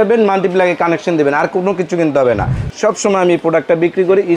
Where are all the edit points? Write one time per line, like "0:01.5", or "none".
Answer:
0:02.6